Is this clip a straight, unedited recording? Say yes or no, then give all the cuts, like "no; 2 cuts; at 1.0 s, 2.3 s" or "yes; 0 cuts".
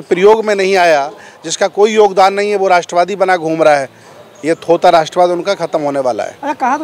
yes; 0 cuts